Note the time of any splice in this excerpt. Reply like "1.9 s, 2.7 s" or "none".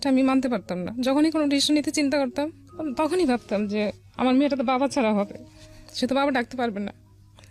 none